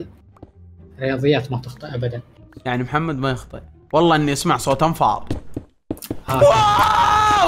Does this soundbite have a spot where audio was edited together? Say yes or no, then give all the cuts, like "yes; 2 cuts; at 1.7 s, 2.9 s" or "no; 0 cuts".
no; 0 cuts